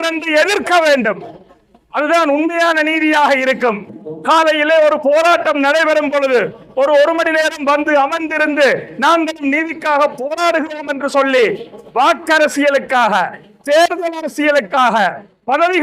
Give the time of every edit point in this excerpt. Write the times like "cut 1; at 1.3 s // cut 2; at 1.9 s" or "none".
none